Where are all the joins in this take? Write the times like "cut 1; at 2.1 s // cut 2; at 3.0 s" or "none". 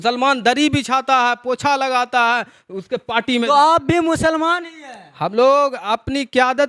none

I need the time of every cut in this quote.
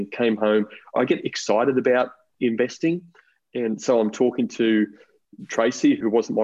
cut 1; at 0.9 s

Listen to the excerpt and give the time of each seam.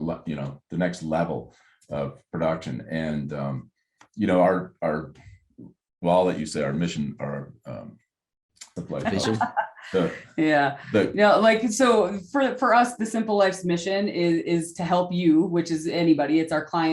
cut 1; at 8.5 s

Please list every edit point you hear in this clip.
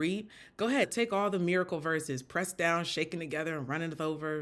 cut 1; at 0.9 s

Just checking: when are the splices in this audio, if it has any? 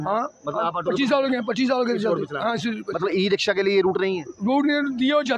none

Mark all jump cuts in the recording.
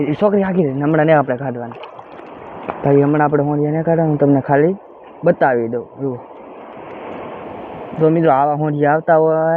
none

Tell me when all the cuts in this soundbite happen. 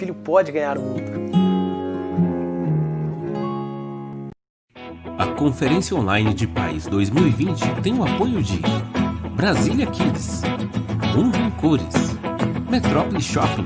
cut 1; at 4.4 s

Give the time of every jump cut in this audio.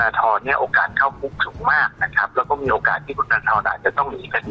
none

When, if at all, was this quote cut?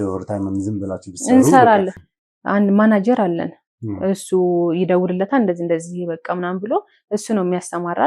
cut 1; at 1.9 s

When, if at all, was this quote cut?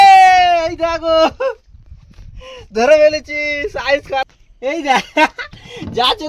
cut 1; at 4.3 s

